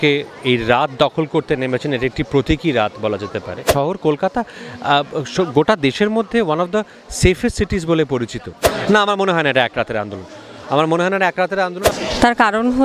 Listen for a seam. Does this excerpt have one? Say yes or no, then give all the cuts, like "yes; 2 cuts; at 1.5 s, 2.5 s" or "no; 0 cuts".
yes; 3 cuts; at 3.6 s, 8.7 s, 11.9 s